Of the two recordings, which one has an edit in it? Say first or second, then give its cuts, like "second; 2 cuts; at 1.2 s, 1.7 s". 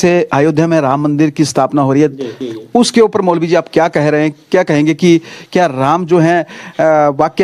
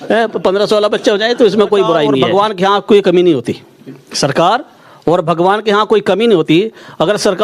second; 1 cut; at 2.3 s